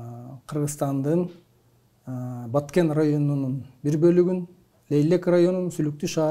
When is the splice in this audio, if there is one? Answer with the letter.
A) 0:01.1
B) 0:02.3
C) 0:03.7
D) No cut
D